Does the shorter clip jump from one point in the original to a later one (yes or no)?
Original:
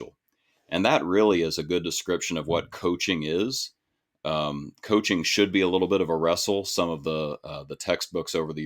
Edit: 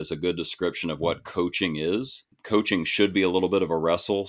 yes